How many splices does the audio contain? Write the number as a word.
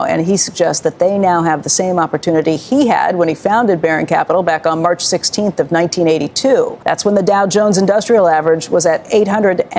zero